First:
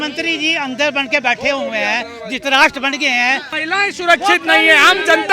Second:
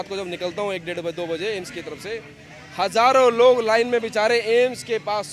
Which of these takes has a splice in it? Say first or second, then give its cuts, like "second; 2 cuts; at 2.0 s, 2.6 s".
first; 1 cut; at 3.5 s